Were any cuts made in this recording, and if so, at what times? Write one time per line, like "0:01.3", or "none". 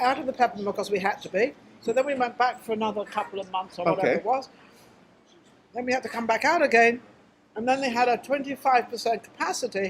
0:08.5

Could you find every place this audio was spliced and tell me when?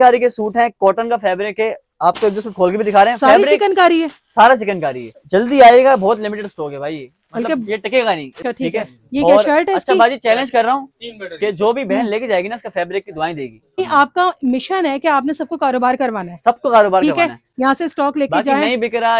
0:05.2
0:08.3
0:13.8

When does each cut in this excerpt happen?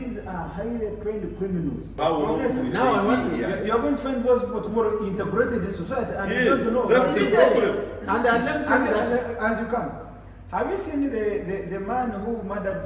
0:02.0

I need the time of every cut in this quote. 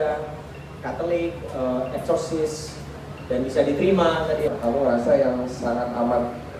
0:04.5

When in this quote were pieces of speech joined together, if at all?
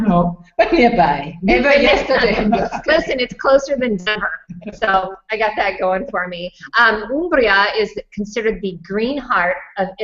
0:08.4

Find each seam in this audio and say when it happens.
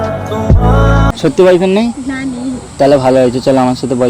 0:01.1

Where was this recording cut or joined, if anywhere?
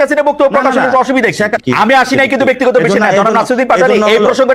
0:01.6

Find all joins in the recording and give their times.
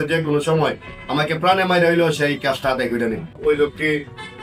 0:03.4

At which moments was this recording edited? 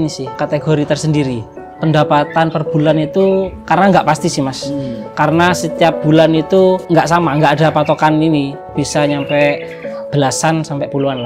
0:01.7

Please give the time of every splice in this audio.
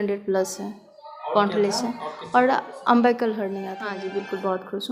0:03.8

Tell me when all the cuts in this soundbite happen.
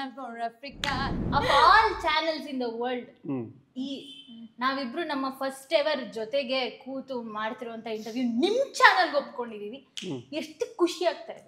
0:01.2

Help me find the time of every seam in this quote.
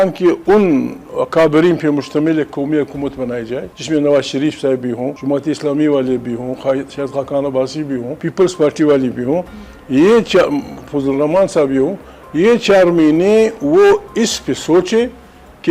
0:01.0
0:03.7
0:05.1
0:08.2

